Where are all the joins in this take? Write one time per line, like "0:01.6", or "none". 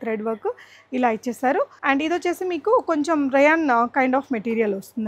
0:01.8

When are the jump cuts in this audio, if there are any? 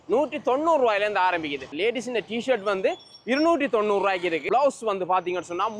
0:01.7
0:04.4

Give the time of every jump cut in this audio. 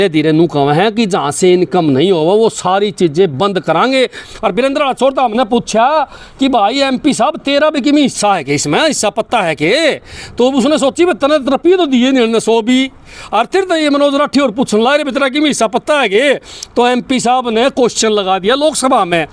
0:04.2

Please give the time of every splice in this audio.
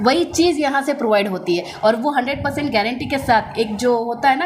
none

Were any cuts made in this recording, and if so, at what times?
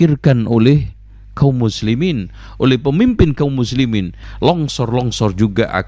0:04.2

